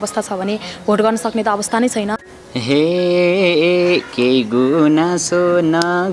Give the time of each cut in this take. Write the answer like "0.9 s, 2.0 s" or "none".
2.2 s